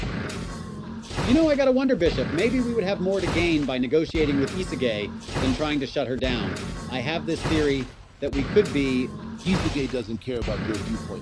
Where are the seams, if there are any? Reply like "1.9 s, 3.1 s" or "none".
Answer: 1.2 s